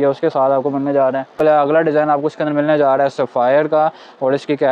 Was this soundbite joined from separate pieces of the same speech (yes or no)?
yes